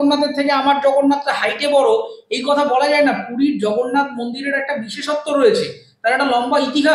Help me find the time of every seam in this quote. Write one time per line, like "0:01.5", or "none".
none